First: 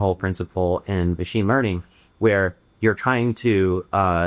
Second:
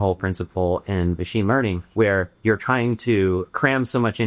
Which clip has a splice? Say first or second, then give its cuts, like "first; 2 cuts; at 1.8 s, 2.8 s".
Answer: second; 2 cuts; at 2.1 s, 3.5 s